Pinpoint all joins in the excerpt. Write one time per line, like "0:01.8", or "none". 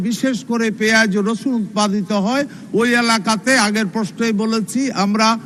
none